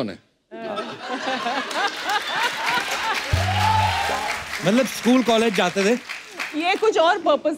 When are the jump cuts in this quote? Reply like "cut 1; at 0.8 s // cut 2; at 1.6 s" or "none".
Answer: cut 1; at 4.2 s